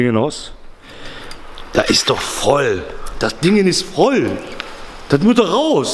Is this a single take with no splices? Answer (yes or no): yes